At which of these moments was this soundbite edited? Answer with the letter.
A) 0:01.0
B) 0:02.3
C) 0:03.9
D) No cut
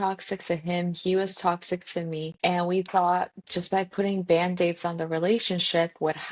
B